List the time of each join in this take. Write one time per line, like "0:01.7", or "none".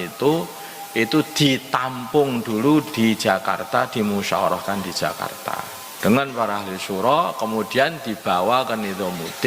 0:05.8